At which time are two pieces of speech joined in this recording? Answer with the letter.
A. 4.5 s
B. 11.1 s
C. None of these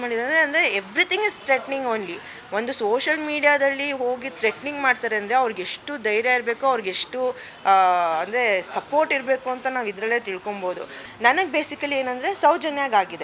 B